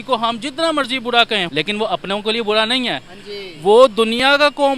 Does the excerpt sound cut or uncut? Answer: cut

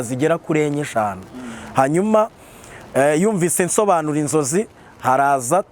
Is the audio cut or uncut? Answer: uncut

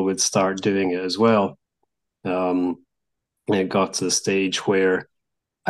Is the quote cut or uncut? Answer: uncut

